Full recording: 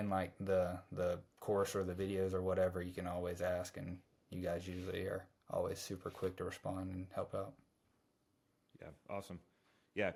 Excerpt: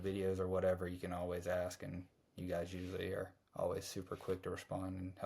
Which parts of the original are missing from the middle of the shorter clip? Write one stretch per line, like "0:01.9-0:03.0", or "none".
none